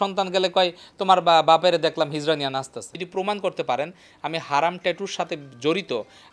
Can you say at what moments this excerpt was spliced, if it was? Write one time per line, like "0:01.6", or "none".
0:03.0